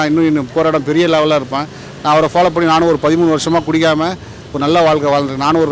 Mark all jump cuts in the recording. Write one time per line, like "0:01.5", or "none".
none